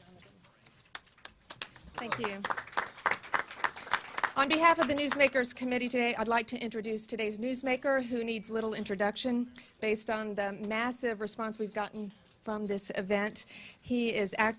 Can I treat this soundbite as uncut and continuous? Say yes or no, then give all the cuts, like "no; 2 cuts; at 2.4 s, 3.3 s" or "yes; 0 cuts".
no; 1 cut; at 12.3 s